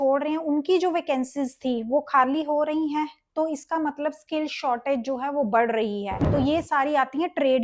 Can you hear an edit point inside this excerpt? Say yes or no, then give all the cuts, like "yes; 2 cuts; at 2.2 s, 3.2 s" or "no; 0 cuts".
yes; 1 cut; at 6.2 s